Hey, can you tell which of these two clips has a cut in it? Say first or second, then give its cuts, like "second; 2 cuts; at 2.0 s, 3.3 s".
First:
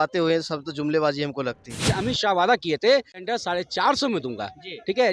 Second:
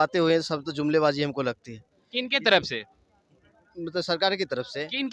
first; 1 cut; at 1.9 s